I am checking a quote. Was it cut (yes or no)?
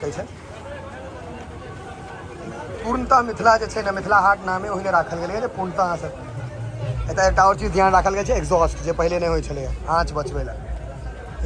no